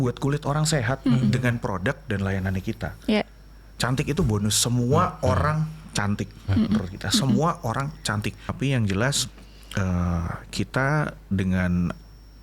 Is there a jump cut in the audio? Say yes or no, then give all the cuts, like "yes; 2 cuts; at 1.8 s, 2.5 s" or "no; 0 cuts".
yes; 1 cut; at 8.4 s